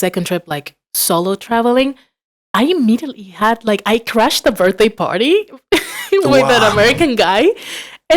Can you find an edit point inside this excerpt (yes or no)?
no